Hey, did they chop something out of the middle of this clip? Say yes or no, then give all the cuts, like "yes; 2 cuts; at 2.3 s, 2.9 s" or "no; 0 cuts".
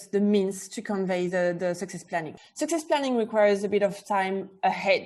yes; 1 cut; at 2.3 s